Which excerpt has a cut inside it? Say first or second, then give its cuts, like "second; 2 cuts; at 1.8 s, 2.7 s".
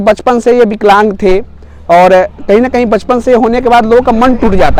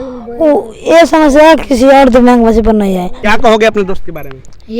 second; 1 cut; at 3.3 s